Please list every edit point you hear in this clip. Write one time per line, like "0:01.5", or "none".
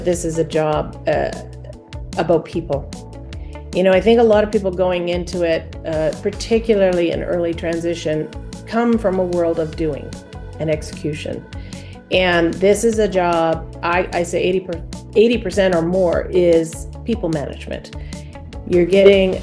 none